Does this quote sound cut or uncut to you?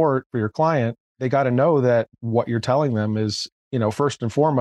uncut